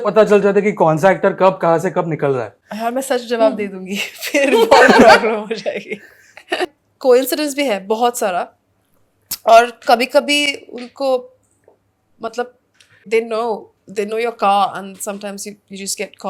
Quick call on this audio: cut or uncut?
cut